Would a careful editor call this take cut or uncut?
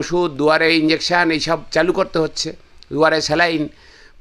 uncut